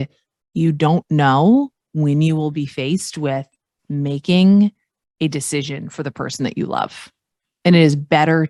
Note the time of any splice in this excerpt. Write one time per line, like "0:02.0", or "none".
none